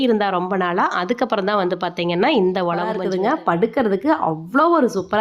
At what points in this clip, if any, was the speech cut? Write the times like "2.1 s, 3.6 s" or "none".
3.0 s